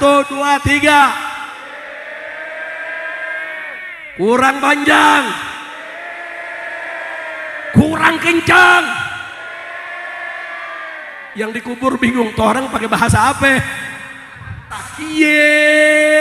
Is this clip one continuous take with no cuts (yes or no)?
no